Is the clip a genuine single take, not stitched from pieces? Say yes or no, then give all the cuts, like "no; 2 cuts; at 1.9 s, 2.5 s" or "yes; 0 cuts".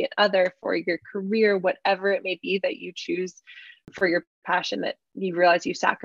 no; 1 cut; at 3.9 s